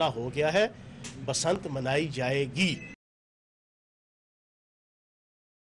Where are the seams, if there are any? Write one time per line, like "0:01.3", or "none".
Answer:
none